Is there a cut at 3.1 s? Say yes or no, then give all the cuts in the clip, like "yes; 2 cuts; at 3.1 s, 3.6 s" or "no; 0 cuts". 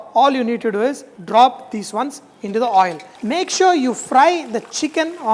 yes; 2 cuts; at 1.1 s, 3.1 s